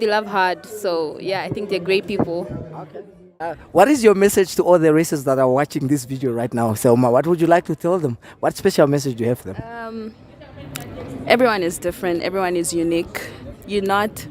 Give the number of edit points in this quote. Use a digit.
1